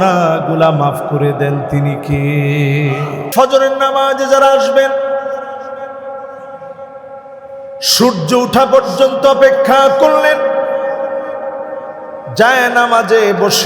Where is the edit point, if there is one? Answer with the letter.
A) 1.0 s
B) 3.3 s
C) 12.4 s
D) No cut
B